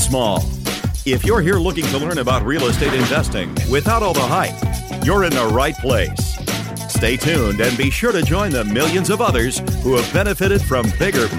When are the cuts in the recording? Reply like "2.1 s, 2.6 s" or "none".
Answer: none